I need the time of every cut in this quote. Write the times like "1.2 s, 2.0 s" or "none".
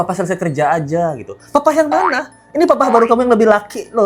none